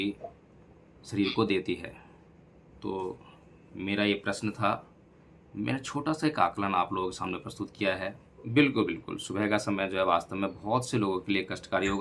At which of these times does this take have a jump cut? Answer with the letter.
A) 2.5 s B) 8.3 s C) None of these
B